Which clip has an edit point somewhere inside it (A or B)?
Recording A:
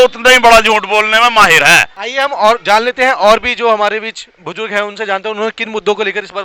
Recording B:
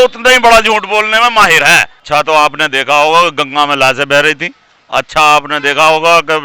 B